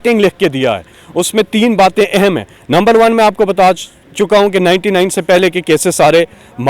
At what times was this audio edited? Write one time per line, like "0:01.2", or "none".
none